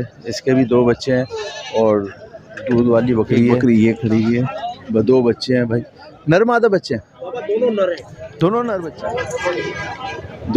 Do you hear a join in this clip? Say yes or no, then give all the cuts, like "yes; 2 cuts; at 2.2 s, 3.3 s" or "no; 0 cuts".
yes; 2 cuts; at 3.6 s, 8.8 s